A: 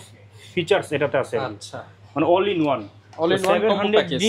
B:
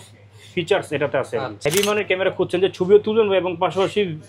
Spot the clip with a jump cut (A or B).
B